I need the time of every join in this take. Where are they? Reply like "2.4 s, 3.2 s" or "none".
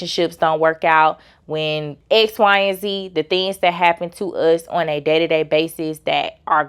1.9 s